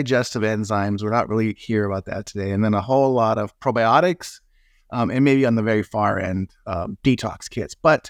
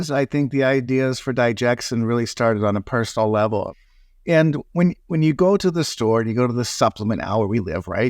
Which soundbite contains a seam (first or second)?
second